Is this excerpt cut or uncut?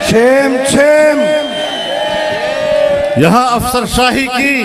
uncut